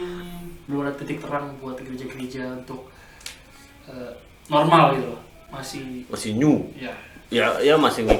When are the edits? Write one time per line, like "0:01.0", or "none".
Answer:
none